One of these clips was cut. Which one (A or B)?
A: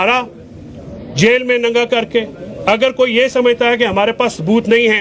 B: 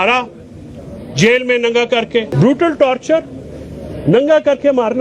B